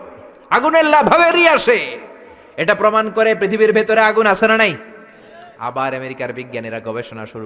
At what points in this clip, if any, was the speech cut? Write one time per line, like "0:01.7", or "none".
none